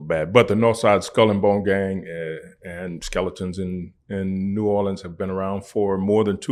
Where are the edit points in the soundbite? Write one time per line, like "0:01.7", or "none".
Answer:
none